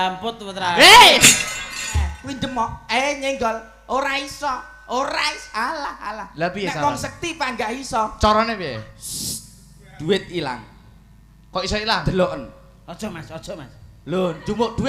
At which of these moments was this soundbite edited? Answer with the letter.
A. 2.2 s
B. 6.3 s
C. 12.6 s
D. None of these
A